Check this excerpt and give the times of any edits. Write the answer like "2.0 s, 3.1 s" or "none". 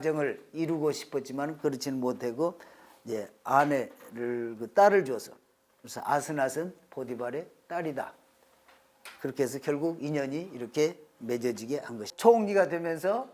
12.1 s